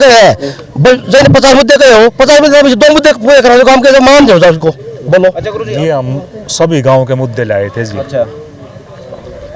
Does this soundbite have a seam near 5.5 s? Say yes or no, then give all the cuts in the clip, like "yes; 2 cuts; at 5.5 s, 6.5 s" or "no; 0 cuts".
yes; 1 cut; at 5.5 s